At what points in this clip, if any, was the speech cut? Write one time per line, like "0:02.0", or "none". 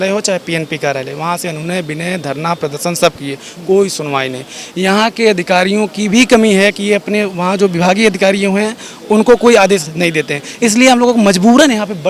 none

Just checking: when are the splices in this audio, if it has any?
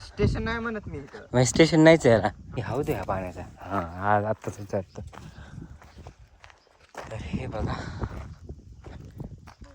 0:02.6

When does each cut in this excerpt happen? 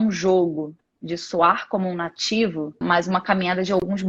0:02.8

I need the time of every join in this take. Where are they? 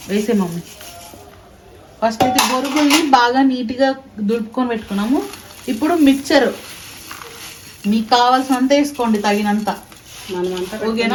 none

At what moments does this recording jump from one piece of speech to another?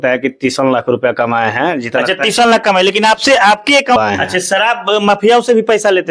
0:04.0

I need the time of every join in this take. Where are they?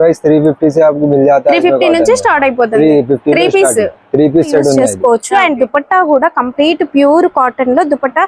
0:04.8

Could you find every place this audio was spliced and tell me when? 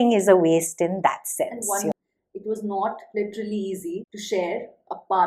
0:01.9

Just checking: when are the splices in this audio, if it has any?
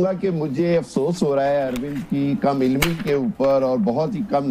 none

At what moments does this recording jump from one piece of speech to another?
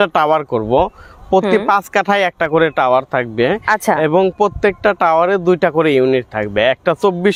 none

